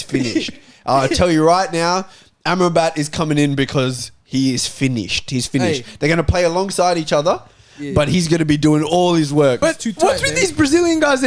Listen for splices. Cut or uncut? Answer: cut